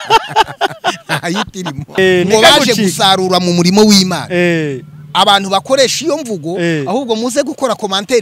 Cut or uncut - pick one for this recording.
cut